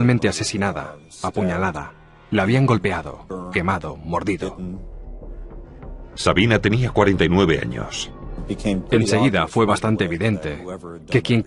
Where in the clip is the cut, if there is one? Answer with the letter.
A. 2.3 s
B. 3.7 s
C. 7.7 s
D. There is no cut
B